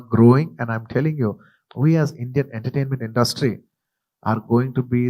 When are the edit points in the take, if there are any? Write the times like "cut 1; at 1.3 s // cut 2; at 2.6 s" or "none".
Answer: cut 1; at 1.5 s